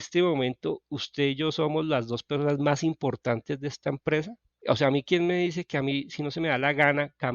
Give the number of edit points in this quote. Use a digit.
1